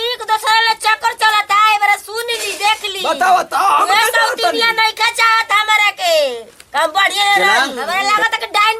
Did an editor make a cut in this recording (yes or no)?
yes